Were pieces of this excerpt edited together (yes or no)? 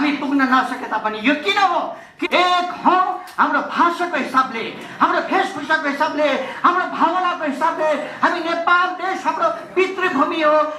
yes